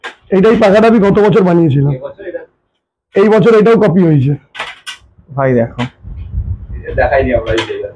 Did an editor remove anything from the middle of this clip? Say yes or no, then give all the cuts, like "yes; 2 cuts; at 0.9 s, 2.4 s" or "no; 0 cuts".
no; 0 cuts